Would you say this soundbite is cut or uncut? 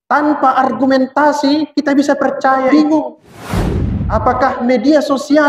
cut